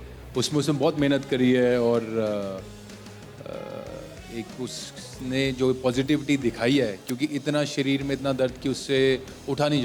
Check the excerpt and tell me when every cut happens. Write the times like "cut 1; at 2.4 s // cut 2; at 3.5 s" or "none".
none